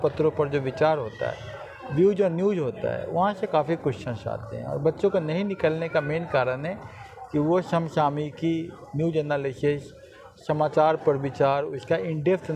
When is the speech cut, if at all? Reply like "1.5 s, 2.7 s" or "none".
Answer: none